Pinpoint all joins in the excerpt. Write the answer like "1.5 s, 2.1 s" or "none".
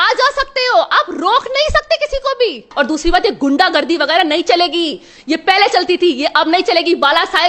2.7 s